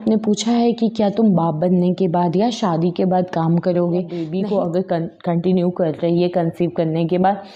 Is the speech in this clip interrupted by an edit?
yes; 1 cut; at 4.3 s

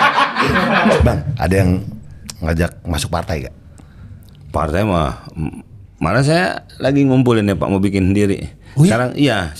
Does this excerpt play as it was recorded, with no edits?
no; 1 cut; at 1.0 s

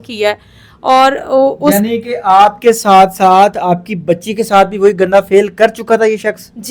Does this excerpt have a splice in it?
no; 0 cuts

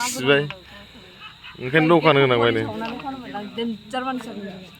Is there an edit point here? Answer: no; 0 cuts

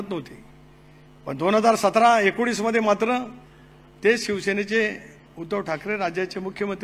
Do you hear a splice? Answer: no; 0 cuts

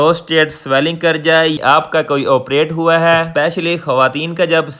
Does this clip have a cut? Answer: yes; 1 cut; at 1.6 s

